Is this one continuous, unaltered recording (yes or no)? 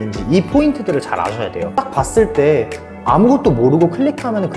no